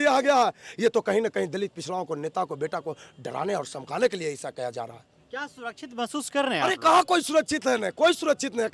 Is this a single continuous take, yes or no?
yes